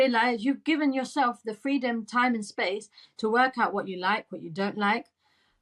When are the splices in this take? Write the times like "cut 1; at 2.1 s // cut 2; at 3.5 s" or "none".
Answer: none